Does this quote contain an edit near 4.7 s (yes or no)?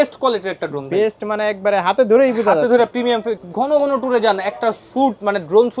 no